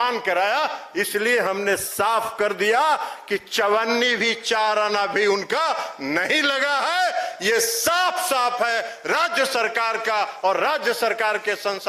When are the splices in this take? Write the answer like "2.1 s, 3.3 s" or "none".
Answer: none